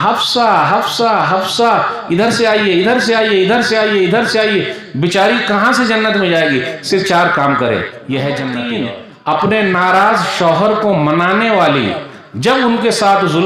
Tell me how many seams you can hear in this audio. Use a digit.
1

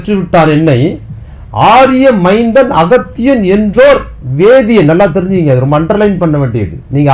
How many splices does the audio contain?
0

